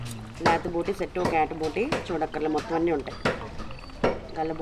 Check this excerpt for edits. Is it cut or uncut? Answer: uncut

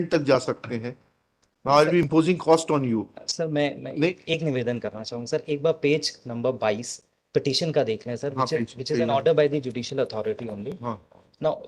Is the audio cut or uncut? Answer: uncut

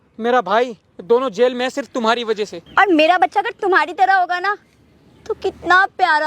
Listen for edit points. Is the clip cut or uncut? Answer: cut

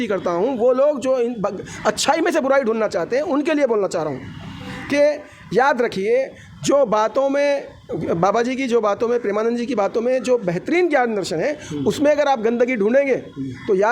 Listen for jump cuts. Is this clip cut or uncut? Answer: uncut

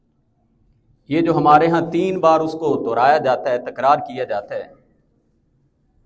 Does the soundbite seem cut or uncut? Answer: uncut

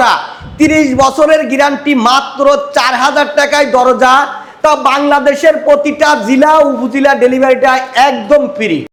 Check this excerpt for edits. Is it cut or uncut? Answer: uncut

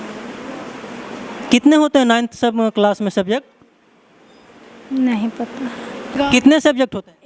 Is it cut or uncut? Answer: cut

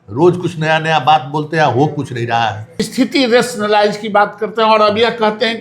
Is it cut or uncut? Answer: cut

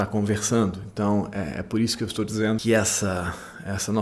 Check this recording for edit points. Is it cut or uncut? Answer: cut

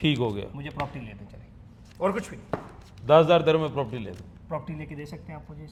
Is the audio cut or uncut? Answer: uncut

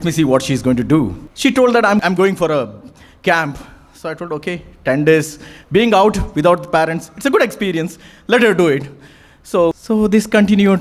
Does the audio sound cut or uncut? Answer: cut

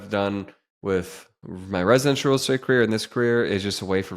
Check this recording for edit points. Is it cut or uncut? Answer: uncut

